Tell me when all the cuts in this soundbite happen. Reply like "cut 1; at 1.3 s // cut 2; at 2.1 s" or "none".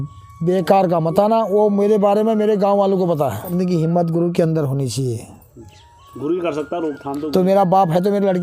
cut 1; at 3.5 s